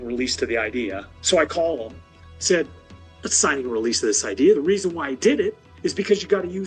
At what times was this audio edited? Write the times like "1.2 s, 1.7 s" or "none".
1.1 s